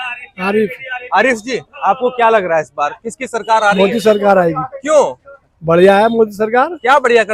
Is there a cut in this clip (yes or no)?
no